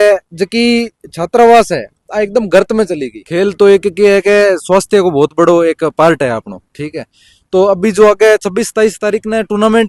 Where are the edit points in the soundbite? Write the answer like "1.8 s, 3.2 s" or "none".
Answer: 3.1 s